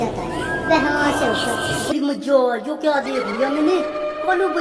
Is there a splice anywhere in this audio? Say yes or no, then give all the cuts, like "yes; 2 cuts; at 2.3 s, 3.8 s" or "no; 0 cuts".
yes; 1 cut; at 1.9 s